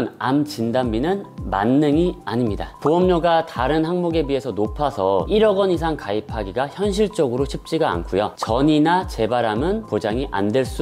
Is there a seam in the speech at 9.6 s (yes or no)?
no